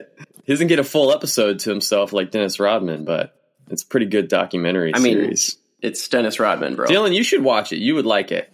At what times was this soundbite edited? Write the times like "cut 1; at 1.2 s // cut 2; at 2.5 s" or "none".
none